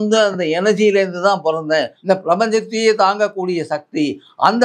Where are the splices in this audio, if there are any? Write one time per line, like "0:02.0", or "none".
0:01.9